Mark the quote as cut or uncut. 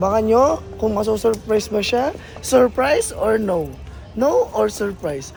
uncut